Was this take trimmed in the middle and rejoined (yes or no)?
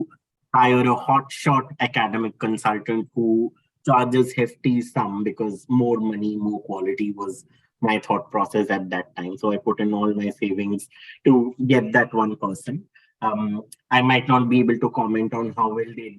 no